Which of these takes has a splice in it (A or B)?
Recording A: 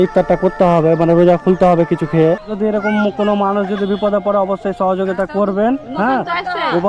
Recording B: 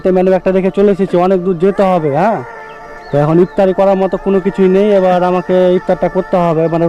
A